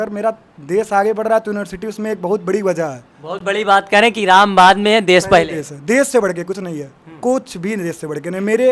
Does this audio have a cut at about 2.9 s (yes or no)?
no